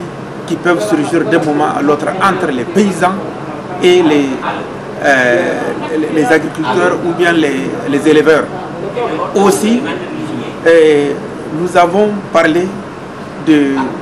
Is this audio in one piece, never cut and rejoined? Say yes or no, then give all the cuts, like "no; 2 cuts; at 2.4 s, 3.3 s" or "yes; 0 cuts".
yes; 0 cuts